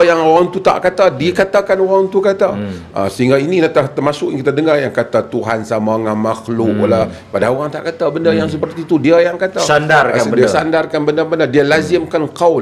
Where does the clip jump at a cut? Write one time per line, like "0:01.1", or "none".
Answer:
none